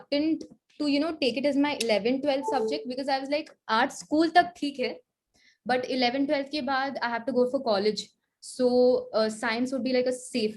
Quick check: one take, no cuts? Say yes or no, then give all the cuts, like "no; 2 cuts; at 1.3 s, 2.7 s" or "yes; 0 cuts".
yes; 0 cuts